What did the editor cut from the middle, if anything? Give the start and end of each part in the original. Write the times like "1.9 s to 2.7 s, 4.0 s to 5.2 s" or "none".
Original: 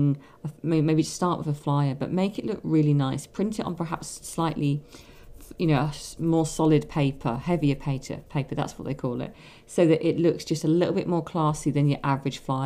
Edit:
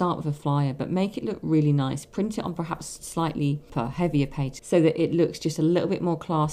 4.9 s to 7.2 s, 8.1 s to 9.6 s